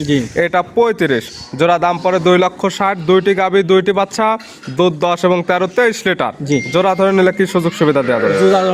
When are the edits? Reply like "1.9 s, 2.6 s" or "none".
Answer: none